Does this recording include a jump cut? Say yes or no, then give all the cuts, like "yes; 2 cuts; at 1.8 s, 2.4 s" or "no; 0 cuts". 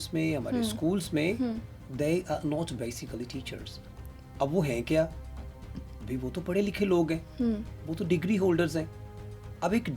no; 0 cuts